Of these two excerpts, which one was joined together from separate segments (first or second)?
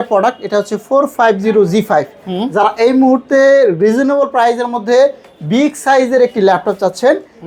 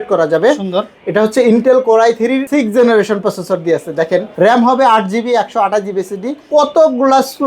second